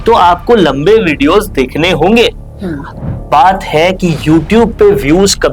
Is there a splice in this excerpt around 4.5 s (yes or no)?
no